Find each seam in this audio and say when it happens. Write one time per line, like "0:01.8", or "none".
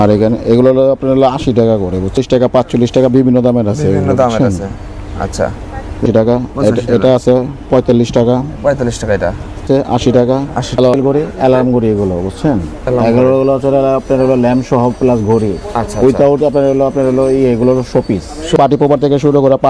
0:02.2
0:06.0
0:09.6
0:10.8
0:18.6